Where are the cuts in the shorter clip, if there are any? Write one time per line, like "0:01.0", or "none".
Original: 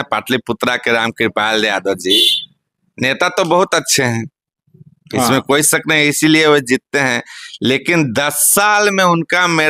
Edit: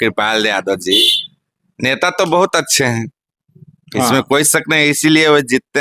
none